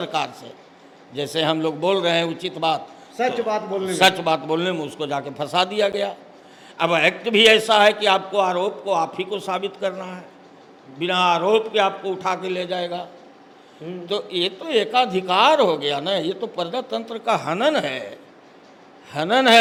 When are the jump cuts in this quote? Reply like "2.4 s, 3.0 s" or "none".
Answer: none